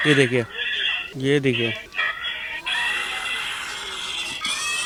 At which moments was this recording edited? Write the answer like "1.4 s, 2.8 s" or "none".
none